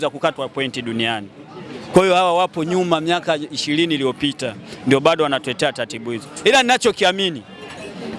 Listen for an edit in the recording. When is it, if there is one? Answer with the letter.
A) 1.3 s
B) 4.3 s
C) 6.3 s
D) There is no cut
D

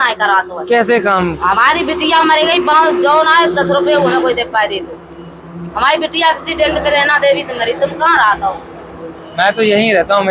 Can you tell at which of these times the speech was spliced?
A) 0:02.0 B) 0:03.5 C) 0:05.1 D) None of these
D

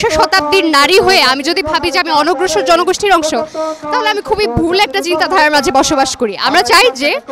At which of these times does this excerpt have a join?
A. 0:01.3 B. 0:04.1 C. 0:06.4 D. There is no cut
D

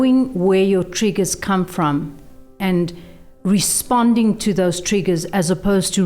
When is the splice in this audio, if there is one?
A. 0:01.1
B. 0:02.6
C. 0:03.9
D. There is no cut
B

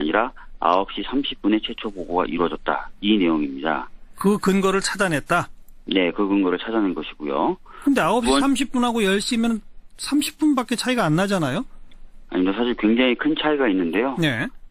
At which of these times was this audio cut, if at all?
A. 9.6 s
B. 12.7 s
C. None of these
C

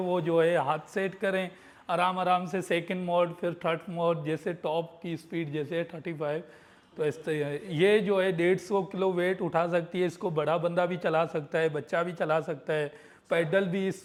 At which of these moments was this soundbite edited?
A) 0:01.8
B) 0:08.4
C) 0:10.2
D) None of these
D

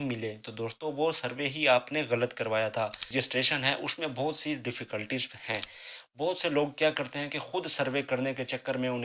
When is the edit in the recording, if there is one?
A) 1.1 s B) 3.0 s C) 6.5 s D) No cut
B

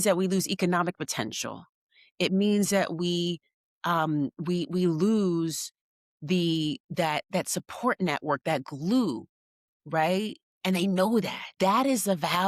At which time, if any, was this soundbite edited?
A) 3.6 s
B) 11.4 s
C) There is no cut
B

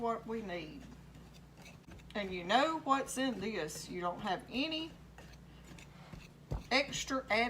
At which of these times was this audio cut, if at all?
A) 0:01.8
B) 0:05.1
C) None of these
A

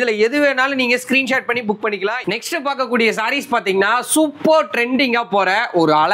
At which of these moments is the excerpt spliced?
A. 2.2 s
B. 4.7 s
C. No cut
A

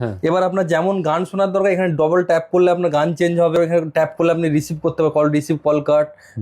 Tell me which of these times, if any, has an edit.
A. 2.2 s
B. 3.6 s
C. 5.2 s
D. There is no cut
B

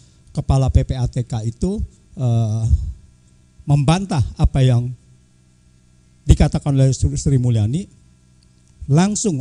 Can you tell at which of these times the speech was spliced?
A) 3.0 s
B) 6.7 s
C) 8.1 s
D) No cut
D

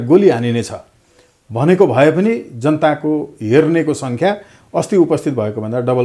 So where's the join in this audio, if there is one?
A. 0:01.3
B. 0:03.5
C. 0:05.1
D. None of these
D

